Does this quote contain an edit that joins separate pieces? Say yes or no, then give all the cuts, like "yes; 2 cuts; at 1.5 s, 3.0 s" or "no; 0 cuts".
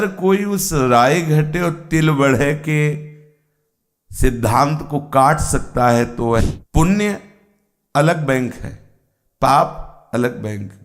yes; 1 cut; at 6.4 s